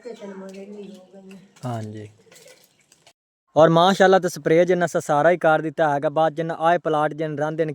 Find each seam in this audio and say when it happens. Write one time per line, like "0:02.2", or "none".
0:03.1